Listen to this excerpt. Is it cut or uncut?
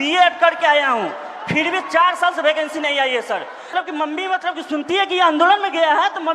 cut